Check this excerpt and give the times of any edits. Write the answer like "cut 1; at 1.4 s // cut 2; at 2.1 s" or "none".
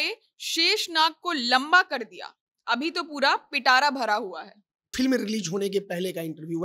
cut 1; at 4.9 s